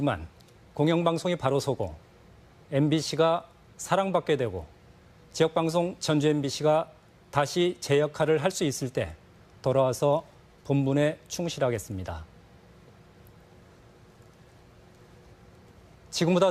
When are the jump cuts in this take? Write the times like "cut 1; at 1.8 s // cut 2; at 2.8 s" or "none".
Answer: none